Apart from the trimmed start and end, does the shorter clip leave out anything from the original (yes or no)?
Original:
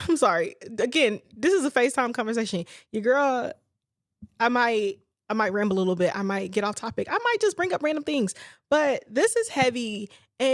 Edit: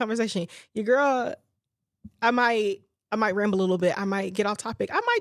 no